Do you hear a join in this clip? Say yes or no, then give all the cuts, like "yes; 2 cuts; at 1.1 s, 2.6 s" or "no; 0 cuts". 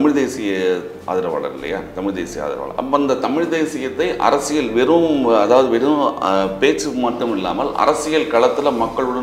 no; 0 cuts